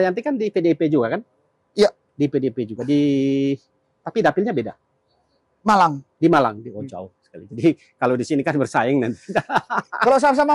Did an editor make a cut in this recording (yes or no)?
no